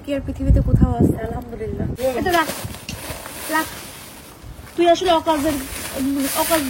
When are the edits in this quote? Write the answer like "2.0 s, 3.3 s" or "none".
1.9 s